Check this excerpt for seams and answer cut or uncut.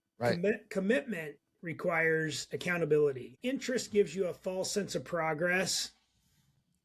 cut